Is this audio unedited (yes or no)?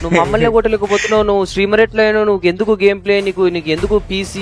yes